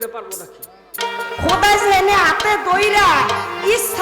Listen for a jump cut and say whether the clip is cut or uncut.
cut